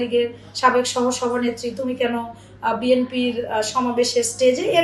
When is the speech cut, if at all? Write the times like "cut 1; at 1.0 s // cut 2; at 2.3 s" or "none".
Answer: none